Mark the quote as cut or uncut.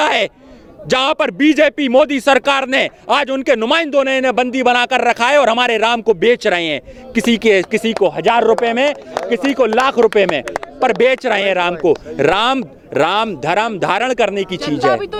uncut